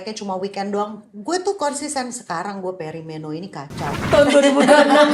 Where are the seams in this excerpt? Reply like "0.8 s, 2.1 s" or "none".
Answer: 4.0 s